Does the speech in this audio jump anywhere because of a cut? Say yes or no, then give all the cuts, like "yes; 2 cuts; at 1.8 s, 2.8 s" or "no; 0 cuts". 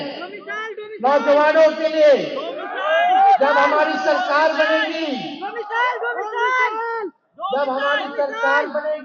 no; 0 cuts